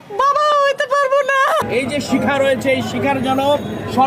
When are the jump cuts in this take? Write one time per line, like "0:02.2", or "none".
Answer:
0:01.6